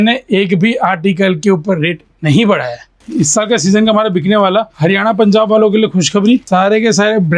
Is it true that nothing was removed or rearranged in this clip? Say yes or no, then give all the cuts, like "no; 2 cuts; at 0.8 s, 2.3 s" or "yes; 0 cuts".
no; 3 cuts; at 3.0 s, 4.7 s, 6.5 s